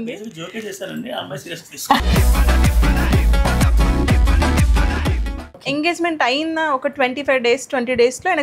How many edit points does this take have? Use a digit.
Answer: 1